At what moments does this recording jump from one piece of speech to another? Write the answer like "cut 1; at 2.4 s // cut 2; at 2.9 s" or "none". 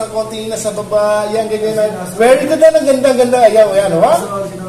none